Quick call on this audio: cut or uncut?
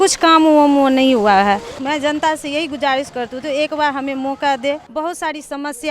cut